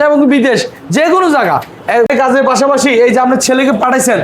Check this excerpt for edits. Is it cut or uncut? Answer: cut